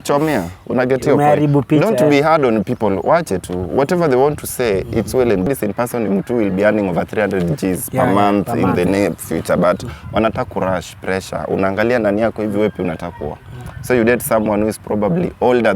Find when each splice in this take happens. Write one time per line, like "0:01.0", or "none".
0:05.5